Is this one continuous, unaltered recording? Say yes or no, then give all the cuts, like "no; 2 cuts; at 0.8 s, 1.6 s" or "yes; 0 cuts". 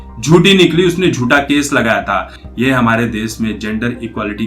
no; 1 cut; at 2.4 s